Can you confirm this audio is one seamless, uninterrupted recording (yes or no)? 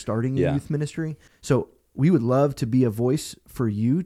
no